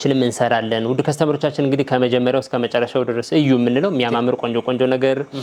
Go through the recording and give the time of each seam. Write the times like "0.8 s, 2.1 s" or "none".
none

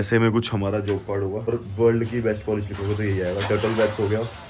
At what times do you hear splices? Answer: 1.5 s

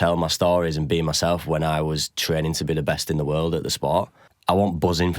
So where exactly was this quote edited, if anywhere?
4.2 s

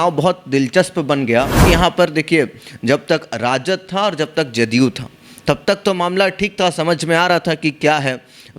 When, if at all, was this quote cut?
1.6 s

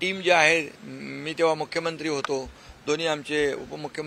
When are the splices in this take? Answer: none

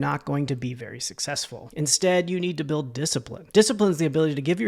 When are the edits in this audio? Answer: none

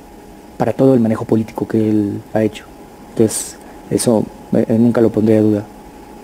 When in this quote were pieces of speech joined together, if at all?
none

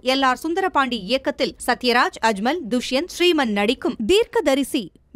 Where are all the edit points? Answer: 4.0 s

